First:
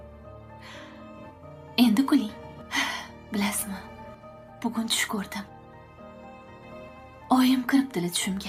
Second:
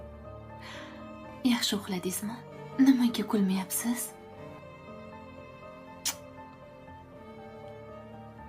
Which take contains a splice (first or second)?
second